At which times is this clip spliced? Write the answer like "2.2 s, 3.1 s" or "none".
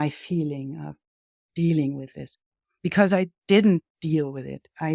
none